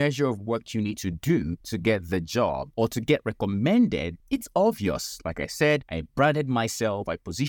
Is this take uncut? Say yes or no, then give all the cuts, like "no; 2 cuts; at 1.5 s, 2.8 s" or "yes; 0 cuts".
no; 4 cuts; at 1.6 s, 2.7 s, 4.1 s, 6.0 s